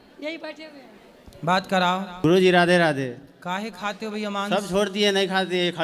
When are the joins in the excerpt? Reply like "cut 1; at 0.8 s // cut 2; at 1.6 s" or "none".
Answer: cut 1; at 2.2 s